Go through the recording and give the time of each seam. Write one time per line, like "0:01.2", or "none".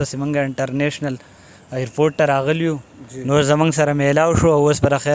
none